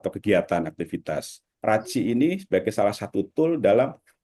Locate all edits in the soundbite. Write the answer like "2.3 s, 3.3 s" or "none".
1.4 s